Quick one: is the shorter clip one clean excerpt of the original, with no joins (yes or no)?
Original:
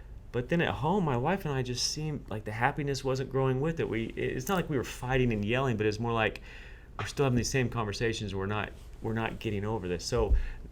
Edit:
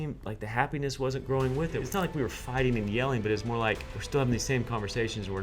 no